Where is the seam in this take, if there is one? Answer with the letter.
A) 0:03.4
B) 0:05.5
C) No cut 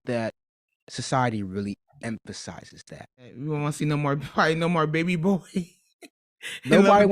A